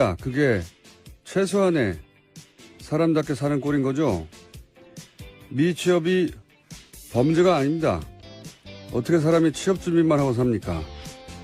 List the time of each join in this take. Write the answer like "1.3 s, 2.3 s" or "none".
10.4 s